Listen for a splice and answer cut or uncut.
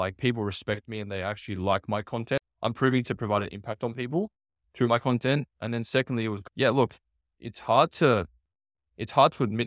cut